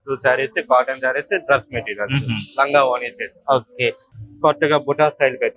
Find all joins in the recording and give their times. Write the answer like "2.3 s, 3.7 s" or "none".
4.1 s